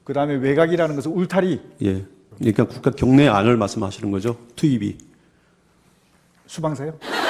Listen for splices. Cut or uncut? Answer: cut